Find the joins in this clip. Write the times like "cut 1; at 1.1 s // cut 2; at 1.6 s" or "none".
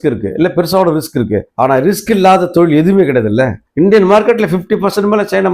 cut 1; at 3.6 s